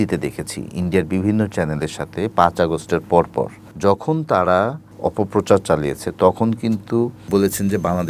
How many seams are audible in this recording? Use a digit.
3